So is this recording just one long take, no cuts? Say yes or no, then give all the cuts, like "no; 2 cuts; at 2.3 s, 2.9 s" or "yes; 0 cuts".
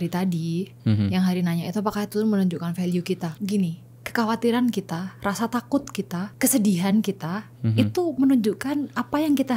no; 2 cuts; at 3.3 s, 6.3 s